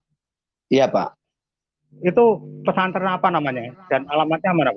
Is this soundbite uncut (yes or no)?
yes